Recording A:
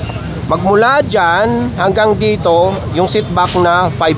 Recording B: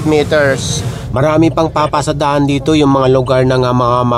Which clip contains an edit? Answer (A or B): B